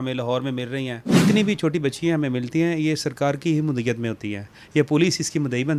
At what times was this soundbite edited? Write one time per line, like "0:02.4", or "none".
0:01.0